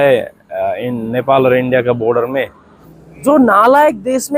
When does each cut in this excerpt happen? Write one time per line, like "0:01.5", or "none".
0:02.9